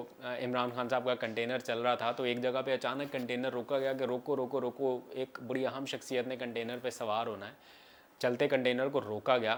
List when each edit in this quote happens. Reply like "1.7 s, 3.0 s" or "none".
none